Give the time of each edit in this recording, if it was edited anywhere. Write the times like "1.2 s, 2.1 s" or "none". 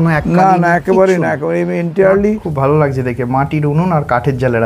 2.5 s